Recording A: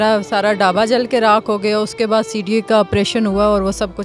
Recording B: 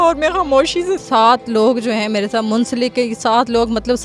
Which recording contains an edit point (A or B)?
B